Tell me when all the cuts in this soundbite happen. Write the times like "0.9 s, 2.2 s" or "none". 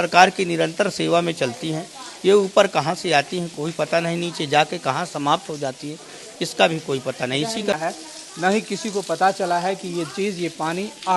7.8 s